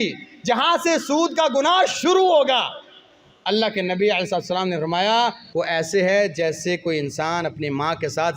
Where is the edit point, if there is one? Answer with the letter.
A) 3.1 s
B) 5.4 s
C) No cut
B